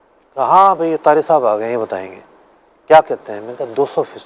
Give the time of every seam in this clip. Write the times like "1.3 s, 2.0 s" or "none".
none